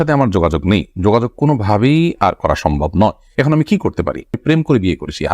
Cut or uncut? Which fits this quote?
cut